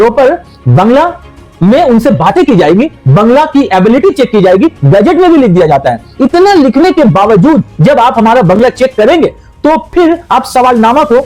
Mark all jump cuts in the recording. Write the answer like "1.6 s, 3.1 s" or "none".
none